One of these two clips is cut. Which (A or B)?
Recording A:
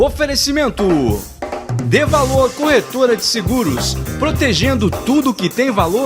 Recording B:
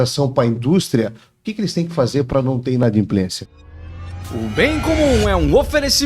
B